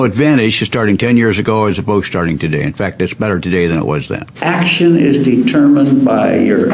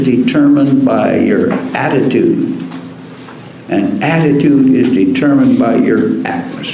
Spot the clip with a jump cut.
first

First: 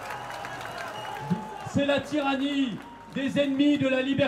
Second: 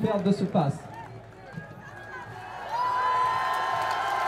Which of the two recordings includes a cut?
first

